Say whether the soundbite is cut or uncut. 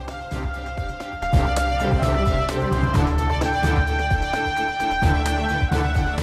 cut